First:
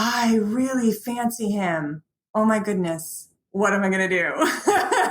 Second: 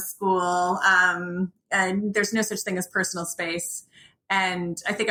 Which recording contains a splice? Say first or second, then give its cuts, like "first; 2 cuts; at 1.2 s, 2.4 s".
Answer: first; 1 cut; at 2.1 s